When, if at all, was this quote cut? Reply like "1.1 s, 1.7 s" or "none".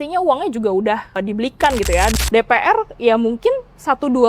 2.1 s